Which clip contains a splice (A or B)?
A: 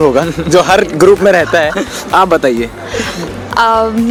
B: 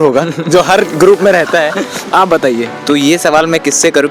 B